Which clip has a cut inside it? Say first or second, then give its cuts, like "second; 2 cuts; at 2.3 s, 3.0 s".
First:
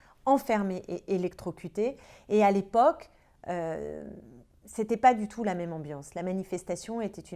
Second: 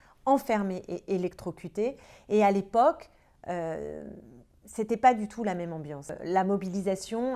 second; 1 cut; at 6.1 s